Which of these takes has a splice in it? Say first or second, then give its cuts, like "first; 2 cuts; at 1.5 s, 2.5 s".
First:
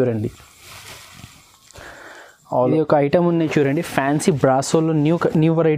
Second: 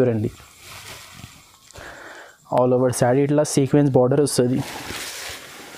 first; 1 cut; at 2.6 s